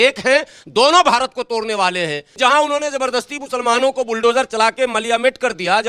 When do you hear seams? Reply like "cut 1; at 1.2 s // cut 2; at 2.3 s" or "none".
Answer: cut 1; at 2.3 s